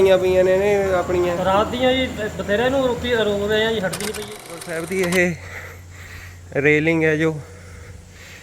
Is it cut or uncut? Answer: cut